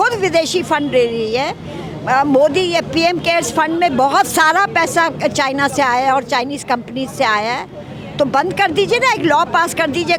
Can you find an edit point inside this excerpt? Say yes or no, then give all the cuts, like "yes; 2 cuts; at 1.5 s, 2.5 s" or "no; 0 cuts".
no; 0 cuts